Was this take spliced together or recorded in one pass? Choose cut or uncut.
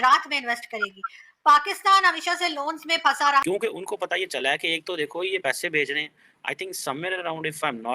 cut